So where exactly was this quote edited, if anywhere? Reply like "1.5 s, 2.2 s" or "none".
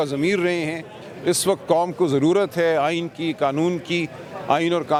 none